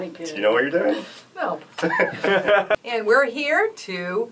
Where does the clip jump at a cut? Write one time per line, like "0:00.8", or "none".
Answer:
0:02.8